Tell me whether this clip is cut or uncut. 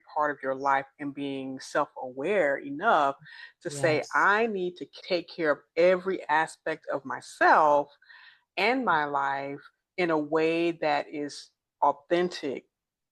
uncut